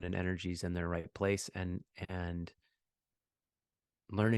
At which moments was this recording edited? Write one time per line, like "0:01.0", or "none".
0:02.9